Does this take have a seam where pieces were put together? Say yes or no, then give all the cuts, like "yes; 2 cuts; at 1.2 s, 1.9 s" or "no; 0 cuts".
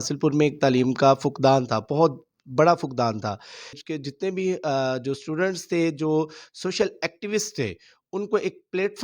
yes; 1 cut; at 3.8 s